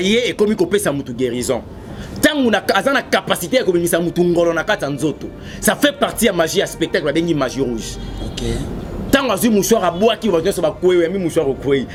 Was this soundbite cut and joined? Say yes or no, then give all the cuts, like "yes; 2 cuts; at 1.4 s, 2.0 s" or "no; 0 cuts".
no; 0 cuts